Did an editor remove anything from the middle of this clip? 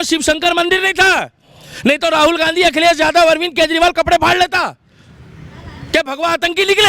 no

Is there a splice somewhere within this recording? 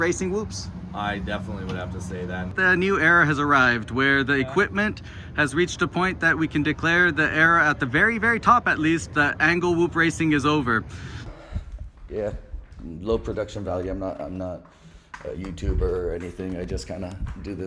yes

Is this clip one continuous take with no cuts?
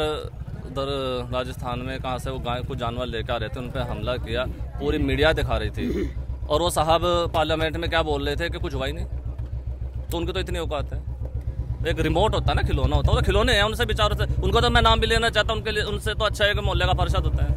yes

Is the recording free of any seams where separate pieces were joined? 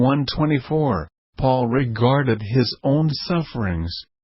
no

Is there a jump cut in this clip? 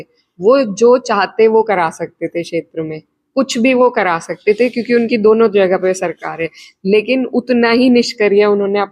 no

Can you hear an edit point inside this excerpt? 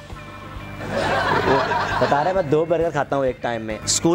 no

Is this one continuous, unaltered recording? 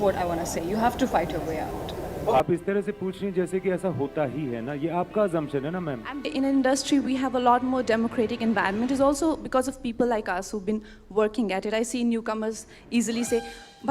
no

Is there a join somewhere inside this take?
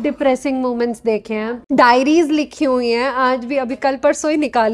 yes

